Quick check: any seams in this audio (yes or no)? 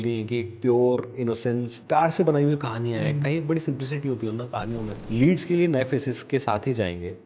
yes